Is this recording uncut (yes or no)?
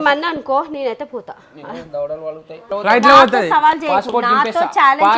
no